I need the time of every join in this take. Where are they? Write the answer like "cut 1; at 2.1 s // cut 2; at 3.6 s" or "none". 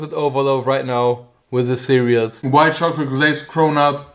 cut 1; at 2.4 s